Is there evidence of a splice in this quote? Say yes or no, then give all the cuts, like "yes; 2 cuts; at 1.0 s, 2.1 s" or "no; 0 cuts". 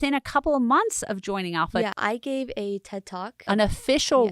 yes; 2 cuts; at 1.9 s, 3.3 s